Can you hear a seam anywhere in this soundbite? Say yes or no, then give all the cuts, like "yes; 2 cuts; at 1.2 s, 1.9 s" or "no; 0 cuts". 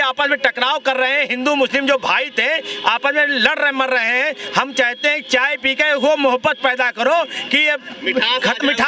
no; 0 cuts